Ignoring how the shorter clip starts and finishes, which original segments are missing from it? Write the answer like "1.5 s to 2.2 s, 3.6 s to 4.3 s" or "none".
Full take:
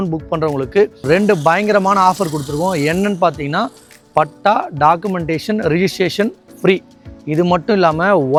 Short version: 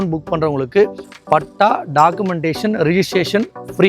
1.0 s to 3.8 s